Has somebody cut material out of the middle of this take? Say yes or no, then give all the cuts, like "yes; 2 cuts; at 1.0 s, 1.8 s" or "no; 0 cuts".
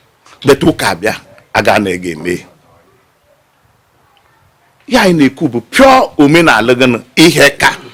no; 0 cuts